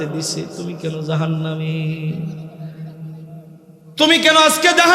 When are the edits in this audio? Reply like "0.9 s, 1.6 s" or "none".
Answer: 3.8 s